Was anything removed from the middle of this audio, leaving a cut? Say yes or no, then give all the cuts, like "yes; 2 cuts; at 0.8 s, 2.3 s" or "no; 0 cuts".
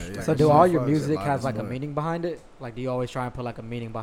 no; 0 cuts